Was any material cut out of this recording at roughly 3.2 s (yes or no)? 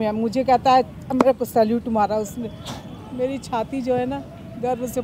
no